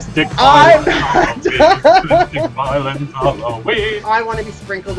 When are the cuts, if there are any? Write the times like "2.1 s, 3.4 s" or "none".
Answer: 4.0 s